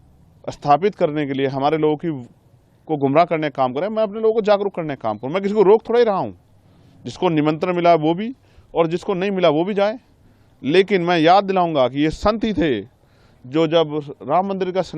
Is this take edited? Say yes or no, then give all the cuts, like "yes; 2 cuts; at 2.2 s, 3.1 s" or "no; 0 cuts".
no; 0 cuts